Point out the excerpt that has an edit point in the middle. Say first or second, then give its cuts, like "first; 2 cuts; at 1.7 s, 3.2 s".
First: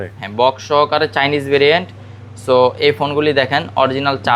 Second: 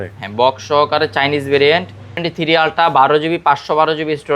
second; 1 cut; at 2.2 s